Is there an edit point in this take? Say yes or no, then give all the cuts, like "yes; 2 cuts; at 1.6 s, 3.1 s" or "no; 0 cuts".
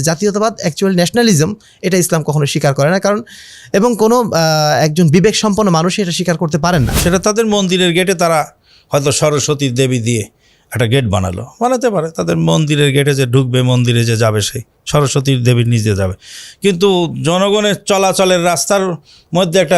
yes; 1 cut; at 6.9 s